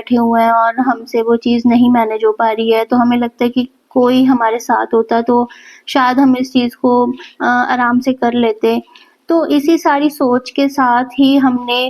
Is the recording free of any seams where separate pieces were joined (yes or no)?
yes